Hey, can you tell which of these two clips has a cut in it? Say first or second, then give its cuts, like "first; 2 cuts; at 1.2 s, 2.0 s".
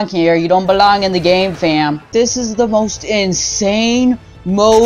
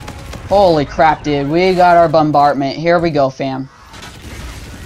first; 1 cut; at 2.1 s